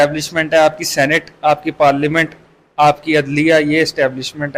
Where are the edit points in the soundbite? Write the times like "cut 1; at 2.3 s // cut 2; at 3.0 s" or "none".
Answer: none